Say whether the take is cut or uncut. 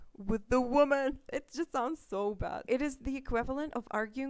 cut